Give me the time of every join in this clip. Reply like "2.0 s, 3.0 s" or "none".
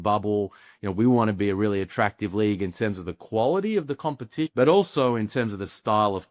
4.5 s